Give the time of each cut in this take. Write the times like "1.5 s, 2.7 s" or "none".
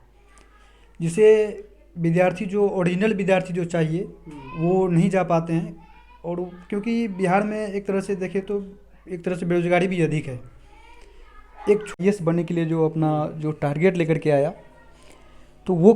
12.0 s